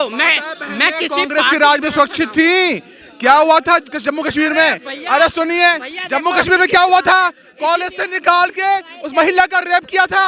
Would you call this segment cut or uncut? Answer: uncut